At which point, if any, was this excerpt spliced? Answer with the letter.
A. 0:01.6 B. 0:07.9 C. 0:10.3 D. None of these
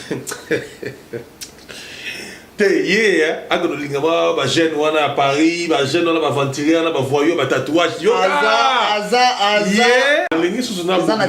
C